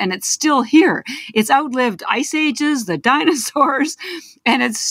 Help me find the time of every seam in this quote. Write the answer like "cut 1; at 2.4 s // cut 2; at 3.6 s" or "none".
none